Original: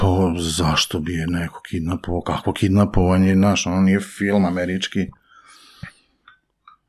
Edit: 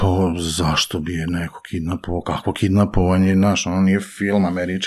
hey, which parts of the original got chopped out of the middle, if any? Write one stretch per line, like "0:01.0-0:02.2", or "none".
none